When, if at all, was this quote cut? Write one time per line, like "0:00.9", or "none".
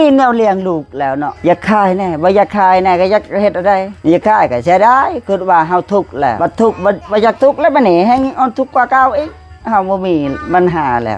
0:01.3
0:03.9
0:06.4
0:07.0